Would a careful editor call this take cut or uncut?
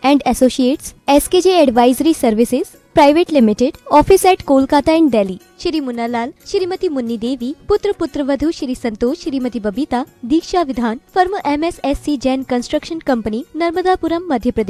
uncut